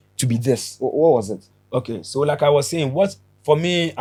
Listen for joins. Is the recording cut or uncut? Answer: uncut